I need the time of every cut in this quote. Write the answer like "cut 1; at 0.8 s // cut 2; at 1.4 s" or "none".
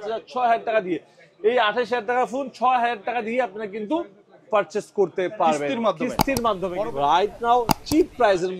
cut 1; at 6.8 s